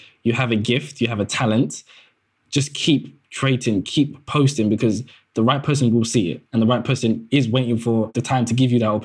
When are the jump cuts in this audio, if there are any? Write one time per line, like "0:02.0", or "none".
0:08.1